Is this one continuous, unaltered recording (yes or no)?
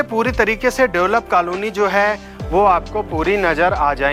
yes